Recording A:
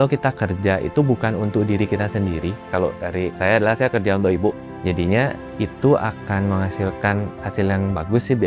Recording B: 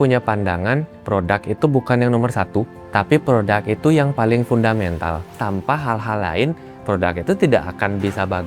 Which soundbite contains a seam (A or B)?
B